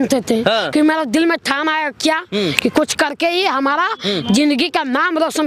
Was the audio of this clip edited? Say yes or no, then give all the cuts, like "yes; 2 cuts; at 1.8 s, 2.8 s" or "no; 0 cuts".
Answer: no; 0 cuts